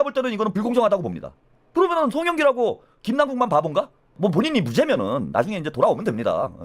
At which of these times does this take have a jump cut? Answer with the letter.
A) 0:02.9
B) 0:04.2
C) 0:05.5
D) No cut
B